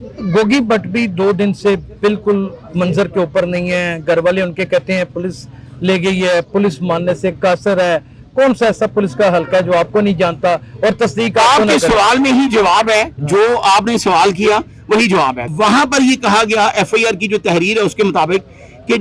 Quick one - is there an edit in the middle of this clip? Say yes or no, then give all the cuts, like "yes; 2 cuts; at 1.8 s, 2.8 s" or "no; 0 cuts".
yes; 1 cut; at 15.5 s